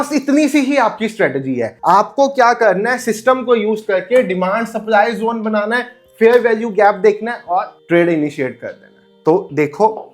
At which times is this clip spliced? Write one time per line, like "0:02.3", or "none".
none